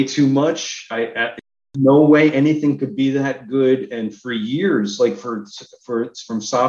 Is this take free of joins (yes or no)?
yes